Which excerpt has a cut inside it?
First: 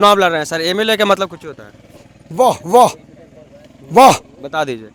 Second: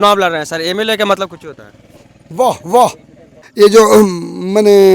second; 1 cut; at 3.4 s

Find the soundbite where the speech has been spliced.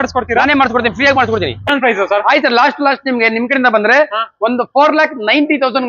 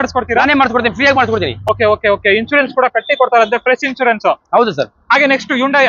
first; 1 cut; at 1.6 s

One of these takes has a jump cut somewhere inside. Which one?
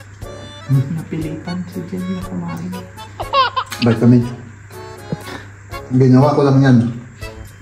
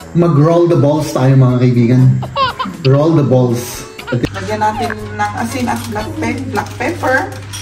second; 1 cut; at 4.2 s

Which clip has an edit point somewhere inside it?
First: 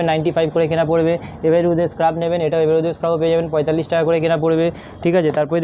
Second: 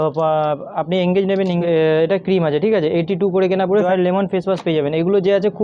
second; 2 cuts; at 1.6 s, 3.8 s

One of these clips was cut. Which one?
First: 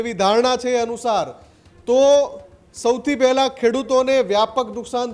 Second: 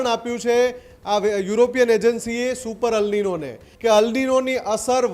second; 1 cut; at 3.6 s

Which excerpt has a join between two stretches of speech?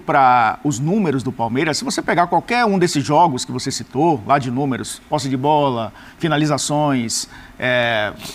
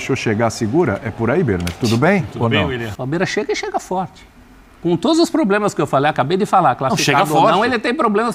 second; 1 cut; at 2.9 s

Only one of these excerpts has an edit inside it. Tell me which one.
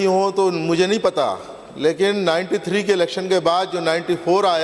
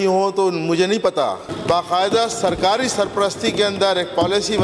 second; 1 cut; at 1.5 s

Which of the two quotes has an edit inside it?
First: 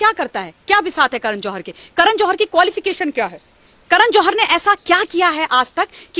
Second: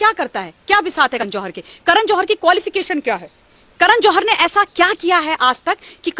second; 1 cut; at 1.2 s

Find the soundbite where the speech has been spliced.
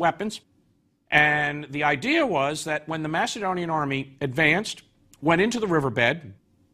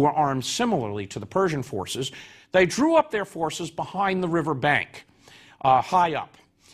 second; 1 cut; at 1.6 s

